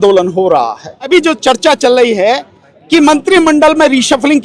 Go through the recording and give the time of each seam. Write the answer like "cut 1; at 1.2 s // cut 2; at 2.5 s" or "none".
cut 1; at 1.1 s